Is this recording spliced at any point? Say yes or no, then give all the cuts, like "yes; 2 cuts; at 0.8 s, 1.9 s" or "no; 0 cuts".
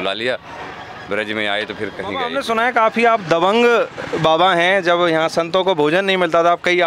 yes; 1 cut; at 2.3 s